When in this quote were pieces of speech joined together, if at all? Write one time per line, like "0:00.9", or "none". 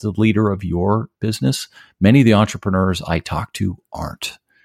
0:01.2